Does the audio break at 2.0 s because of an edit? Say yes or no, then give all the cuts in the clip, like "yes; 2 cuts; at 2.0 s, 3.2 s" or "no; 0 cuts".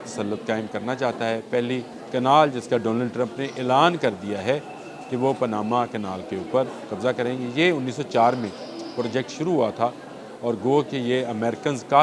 yes; 1 cut; at 2.0 s